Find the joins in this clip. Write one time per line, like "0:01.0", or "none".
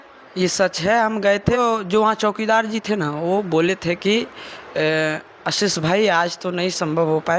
0:01.6